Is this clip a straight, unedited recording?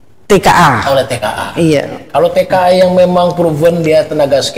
yes; 0 cuts

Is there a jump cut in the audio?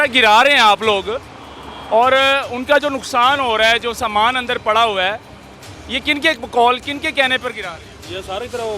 no; 0 cuts

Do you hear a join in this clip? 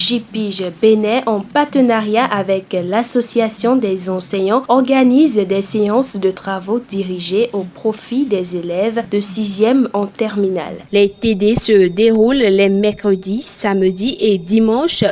no; 0 cuts

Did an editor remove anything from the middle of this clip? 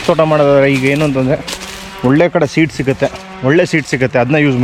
no; 0 cuts

